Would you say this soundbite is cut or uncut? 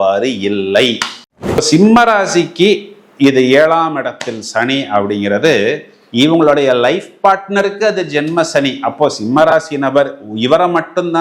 cut